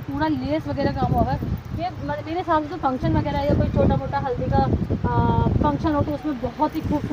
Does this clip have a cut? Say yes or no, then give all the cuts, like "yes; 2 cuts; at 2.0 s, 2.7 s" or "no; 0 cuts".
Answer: no; 0 cuts